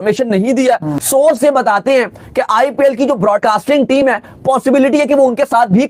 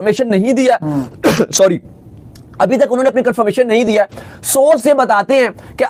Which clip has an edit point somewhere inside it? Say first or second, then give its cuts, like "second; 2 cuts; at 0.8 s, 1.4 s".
first; 1 cut; at 0.9 s